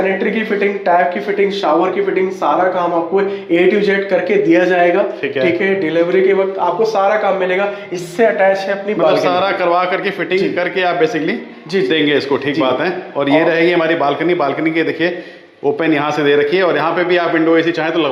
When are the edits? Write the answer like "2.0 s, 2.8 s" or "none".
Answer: none